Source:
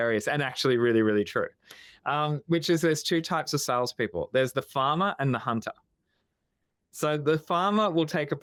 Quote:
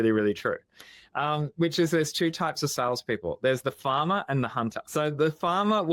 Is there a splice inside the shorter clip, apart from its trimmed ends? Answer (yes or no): yes